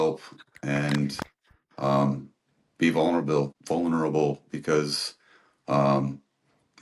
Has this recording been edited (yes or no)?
yes